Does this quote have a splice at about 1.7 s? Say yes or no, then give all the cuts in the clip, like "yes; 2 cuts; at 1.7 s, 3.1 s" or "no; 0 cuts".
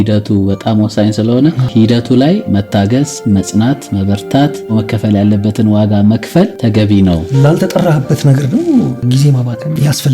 yes; 5 cuts; at 1.7 s, 3.0 s, 6.5 s, 7.2 s, 9.1 s